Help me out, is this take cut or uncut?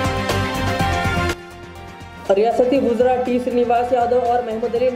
uncut